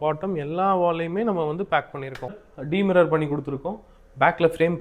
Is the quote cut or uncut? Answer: cut